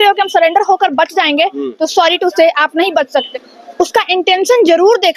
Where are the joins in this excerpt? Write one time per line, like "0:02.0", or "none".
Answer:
0:03.3

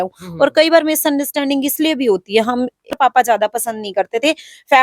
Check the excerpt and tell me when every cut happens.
0:02.8

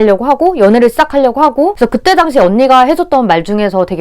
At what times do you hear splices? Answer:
0:01.7

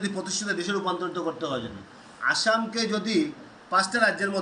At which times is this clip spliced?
none

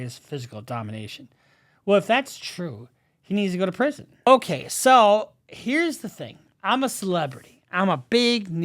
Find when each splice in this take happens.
0:04.3

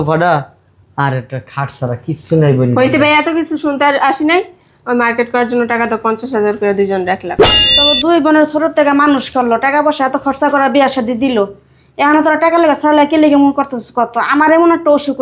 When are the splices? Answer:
0:07.4

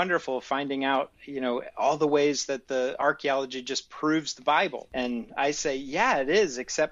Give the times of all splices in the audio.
none

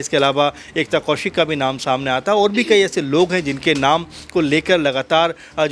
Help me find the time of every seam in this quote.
none

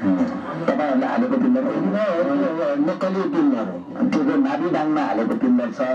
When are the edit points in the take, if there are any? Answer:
none

